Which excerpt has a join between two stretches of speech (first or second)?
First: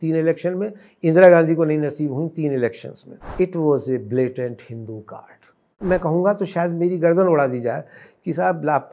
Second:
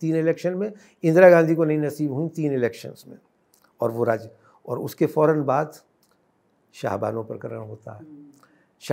first